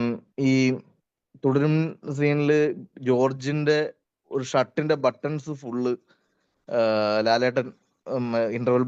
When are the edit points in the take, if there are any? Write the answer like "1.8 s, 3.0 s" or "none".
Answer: none

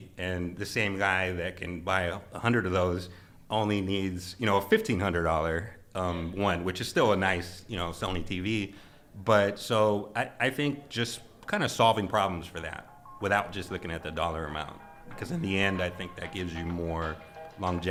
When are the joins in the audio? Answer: none

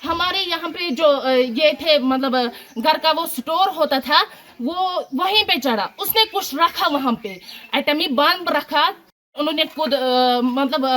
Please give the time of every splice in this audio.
9.3 s

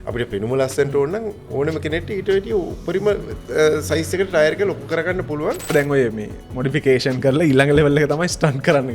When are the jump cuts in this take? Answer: 5.7 s

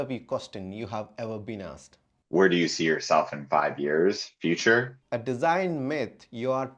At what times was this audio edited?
1.9 s, 5.0 s

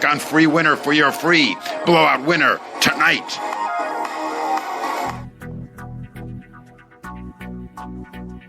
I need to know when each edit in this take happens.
5.1 s

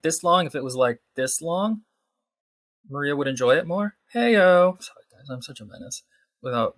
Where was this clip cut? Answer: 4.9 s

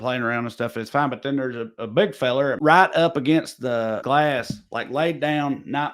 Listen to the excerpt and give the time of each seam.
2.6 s, 4.0 s

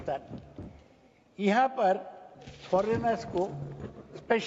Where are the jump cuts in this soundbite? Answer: none

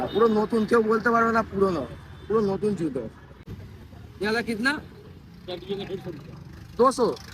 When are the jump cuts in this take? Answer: 3.4 s

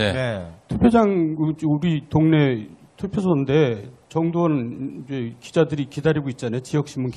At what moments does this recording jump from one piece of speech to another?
1.9 s

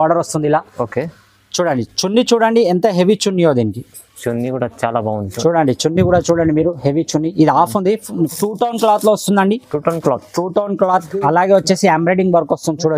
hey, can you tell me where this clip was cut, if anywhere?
8.3 s

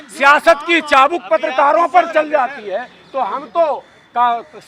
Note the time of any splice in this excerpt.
none

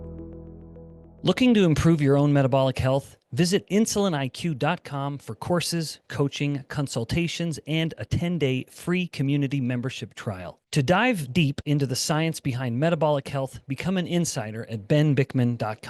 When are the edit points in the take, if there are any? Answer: 1.0 s

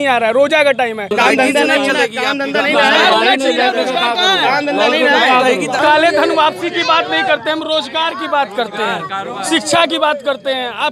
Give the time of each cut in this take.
1.1 s, 5.8 s

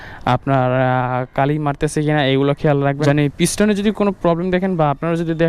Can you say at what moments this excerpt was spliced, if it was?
3.0 s

